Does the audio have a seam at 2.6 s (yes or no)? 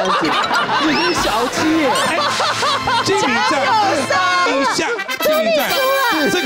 no